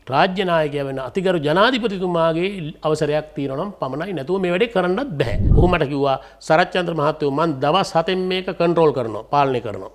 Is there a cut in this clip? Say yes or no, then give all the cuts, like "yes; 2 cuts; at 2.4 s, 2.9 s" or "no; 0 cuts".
yes; 1 cut; at 5.4 s